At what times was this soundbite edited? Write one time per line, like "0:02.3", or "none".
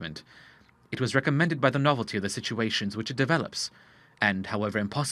0:03.1